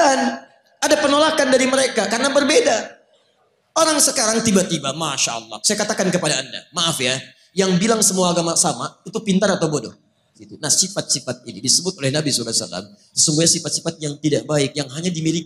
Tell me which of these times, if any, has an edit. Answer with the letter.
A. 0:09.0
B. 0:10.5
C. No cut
B